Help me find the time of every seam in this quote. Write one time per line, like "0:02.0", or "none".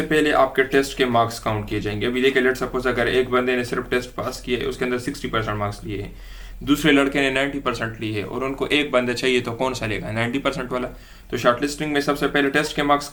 none